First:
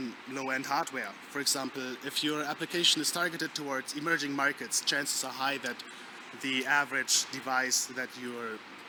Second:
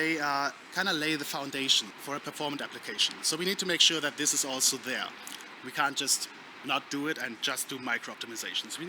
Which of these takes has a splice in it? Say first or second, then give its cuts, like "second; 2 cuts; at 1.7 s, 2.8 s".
second; 1 cut; at 1.9 s